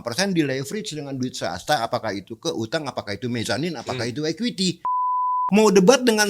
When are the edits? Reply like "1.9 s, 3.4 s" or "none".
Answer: 5.1 s

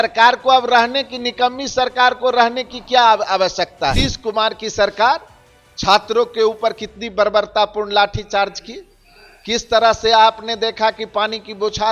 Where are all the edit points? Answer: 4.1 s

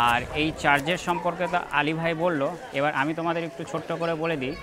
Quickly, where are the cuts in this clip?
none

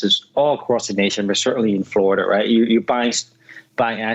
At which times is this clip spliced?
none

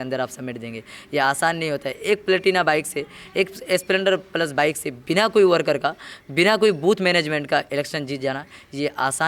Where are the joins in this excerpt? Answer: none

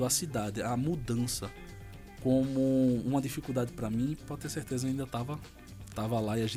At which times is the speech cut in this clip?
none

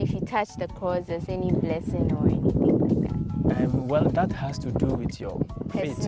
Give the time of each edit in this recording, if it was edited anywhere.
none

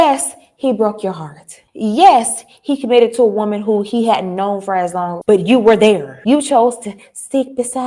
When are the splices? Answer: 6.1 s

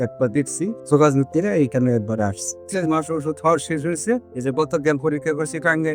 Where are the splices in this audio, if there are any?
0.8 s, 2.6 s

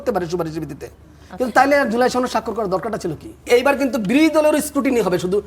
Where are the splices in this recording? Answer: 3.4 s

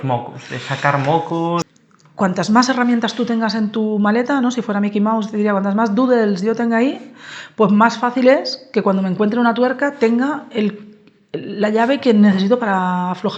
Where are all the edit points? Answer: 1.7 s

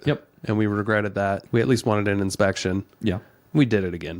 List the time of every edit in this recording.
1.4 s

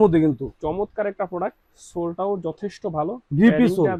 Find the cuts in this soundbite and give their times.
none

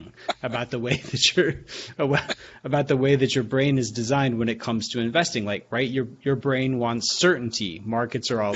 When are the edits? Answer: none

